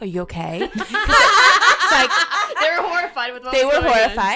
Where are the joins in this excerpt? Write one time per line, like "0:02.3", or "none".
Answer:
none